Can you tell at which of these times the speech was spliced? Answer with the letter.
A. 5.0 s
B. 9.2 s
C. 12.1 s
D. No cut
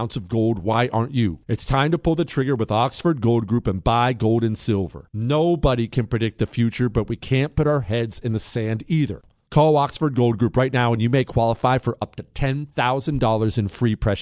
B